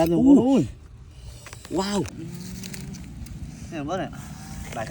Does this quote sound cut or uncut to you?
cut